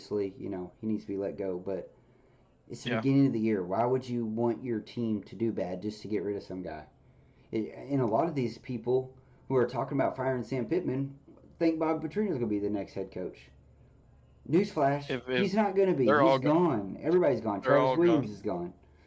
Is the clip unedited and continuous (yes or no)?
yes